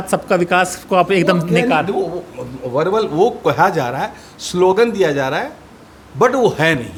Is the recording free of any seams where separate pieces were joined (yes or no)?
yes